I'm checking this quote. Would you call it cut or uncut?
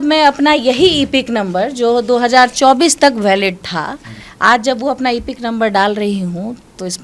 uncut